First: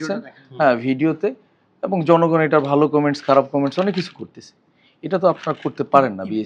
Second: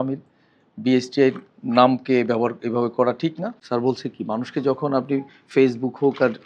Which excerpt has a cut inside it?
second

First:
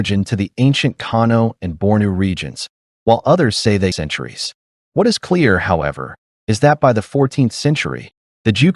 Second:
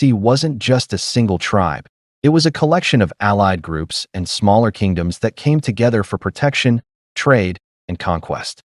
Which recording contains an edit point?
first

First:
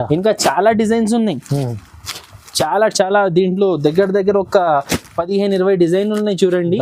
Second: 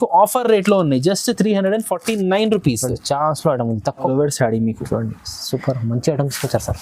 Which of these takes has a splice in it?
second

